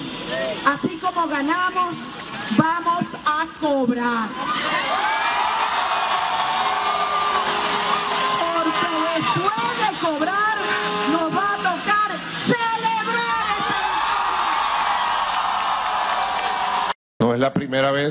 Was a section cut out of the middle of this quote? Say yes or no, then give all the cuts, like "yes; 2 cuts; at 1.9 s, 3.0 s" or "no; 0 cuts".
yes; 1 cut; at 17.1 s